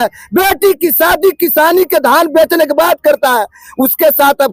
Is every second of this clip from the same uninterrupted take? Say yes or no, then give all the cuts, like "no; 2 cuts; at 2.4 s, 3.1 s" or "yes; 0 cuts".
yes; 0 cuts